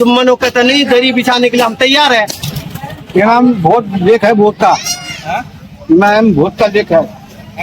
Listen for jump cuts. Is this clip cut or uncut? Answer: cut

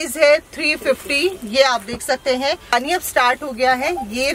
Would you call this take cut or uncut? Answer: cut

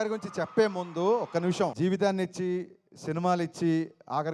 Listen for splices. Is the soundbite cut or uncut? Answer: cut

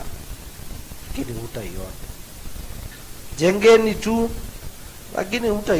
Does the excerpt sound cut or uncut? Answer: cut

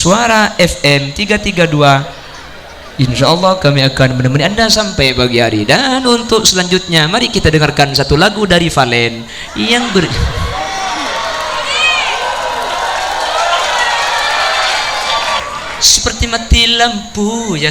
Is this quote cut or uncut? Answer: cut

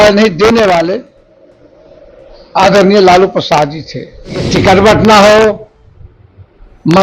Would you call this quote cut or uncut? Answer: cut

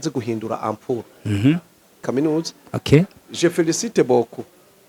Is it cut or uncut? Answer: cut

